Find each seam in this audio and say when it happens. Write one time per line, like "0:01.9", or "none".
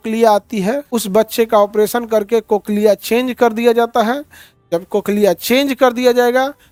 none